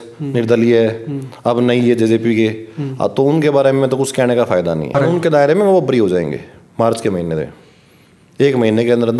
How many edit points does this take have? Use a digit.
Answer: 1